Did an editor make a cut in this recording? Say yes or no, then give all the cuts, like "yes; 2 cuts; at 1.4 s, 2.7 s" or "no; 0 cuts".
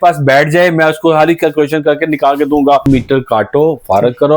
yes; 1 cut; at 2.8 s